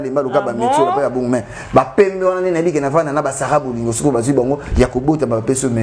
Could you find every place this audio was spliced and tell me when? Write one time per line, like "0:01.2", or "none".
none